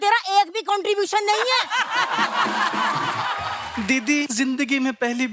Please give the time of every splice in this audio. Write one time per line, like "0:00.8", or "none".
0:03.4
0:04.3